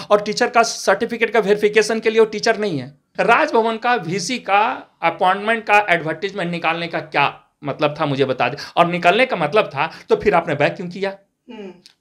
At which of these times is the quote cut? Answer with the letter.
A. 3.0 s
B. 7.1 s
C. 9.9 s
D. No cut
A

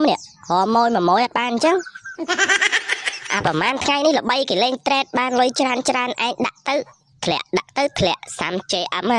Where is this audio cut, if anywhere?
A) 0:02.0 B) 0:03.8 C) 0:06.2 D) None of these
D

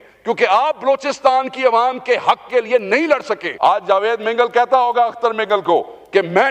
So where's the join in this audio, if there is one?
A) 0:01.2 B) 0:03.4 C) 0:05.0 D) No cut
B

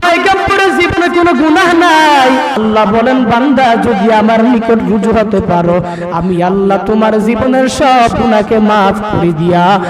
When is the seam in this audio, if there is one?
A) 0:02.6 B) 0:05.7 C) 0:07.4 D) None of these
A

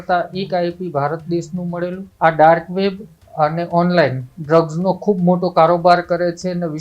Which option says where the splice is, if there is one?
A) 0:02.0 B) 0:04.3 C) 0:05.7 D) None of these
A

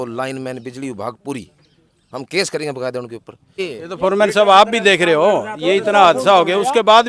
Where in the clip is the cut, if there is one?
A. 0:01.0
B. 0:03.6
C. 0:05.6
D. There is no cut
B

